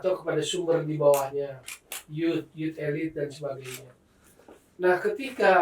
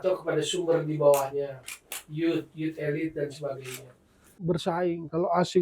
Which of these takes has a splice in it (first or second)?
second